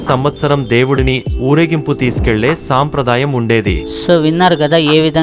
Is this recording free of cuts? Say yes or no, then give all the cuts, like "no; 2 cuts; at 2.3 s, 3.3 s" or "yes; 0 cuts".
no; 1 cut; at 3.8 s